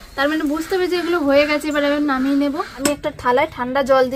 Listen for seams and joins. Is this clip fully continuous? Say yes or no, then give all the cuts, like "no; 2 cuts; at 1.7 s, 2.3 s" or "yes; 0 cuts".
no; 1 cut; at 2.7 s